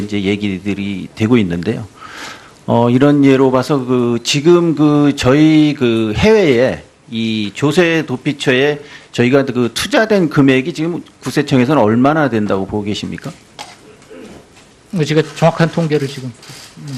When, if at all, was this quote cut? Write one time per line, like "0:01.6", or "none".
0:14.0